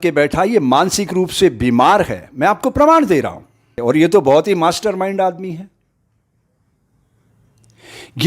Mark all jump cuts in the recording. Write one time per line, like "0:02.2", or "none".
0:03.7